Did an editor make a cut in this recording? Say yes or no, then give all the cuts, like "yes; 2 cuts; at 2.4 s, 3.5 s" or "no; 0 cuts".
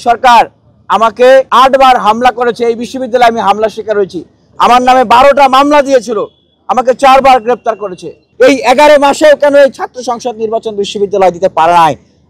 yes; 2 cuts; at 1.5 s, 8.2 s